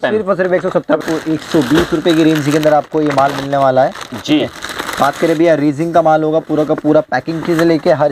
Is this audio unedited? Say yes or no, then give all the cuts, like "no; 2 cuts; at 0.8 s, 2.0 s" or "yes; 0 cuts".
no; 1 cut; at 1.0 s